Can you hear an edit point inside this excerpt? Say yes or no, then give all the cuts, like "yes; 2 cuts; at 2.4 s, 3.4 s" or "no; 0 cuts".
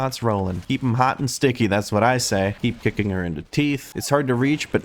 yes; 1 cut; at 2.5 s